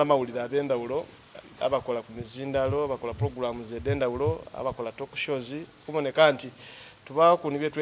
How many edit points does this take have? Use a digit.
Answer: 0